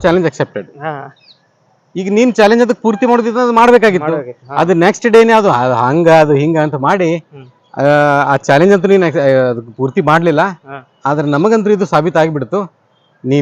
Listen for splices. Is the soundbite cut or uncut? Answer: uncut